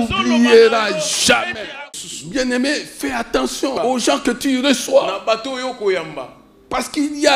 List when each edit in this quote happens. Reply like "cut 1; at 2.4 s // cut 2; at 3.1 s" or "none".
cut 1; at 1.8 s // cut 2; at 3.8 s